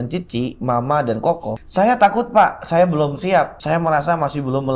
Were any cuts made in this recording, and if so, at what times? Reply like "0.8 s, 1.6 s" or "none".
1.6 s, 3.6 s